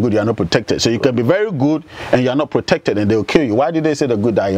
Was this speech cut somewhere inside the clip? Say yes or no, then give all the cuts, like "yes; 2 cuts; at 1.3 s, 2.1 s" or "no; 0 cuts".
no; 0 cuts